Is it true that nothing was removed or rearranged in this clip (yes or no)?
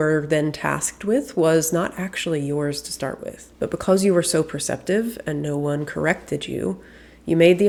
yes